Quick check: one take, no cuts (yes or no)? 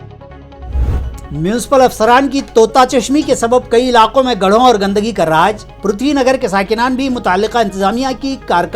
no